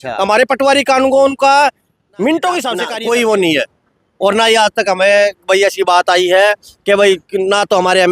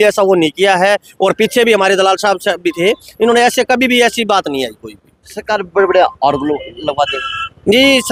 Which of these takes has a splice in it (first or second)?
first